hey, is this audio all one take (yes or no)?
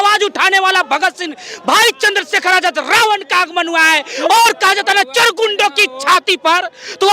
yes